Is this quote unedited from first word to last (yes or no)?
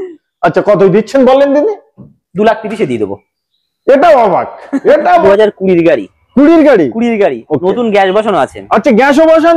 no